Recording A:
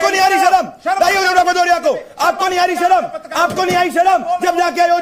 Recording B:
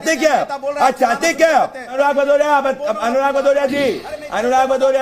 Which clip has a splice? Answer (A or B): B